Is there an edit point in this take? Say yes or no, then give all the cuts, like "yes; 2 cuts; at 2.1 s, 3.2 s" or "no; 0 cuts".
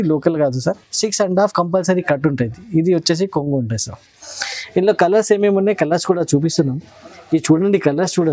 no; 0 cuts